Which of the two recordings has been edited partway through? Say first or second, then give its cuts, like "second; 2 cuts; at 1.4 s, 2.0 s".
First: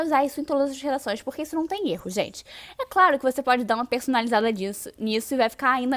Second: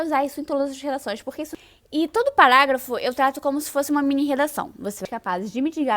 second; 2 cuts; at 1.5 s, 5.0 s